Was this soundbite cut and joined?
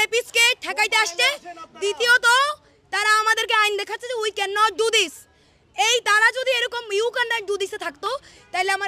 no; 0 cuts

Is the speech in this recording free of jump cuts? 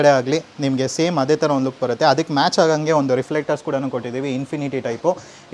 yes; 0 cuts

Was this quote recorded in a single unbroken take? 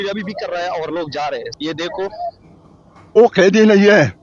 no; 1 cut; at 3.2 s

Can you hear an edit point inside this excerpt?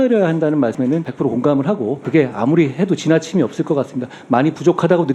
yes; 2 cuts; at 0.9 s, 2.0 s

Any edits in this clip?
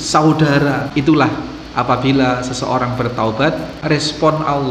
yes; 2 cuts; at 0.9 s, 3.8 s

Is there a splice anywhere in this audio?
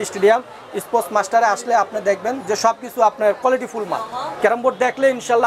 no; 0 cuts

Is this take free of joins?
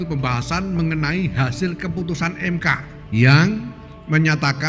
no; 1 cut; at 2.9 s

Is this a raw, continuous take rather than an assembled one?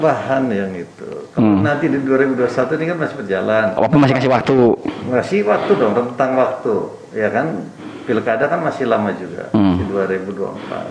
yes; 0 cuts

